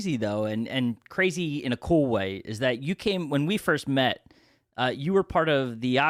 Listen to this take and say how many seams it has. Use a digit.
0